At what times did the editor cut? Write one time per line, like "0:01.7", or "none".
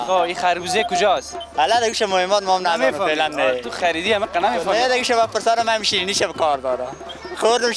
none